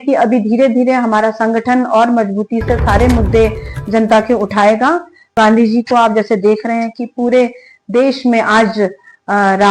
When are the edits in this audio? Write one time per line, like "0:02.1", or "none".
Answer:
0:05.4